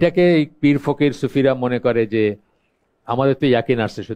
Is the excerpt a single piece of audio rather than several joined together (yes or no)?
yes